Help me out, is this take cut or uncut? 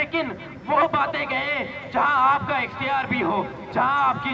uncut